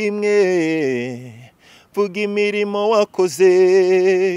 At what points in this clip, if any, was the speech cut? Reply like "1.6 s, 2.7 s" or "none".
none